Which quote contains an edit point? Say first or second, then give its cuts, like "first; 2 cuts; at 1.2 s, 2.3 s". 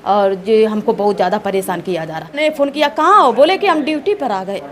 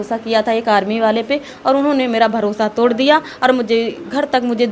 first; 1 cut; at 2.4 s